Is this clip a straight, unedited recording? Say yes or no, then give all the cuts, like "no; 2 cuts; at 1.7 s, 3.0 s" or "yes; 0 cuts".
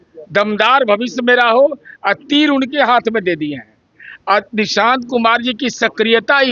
yes; 0 cuts